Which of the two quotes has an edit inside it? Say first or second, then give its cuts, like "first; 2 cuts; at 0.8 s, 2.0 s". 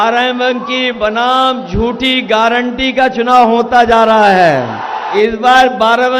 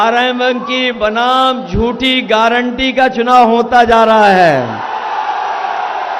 first; 1 cut; at 5.0 s